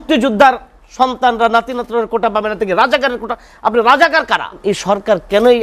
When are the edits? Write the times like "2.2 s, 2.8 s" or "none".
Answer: 4.5 s